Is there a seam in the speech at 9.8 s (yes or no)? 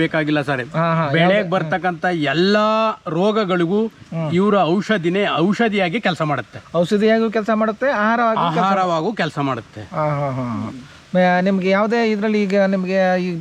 no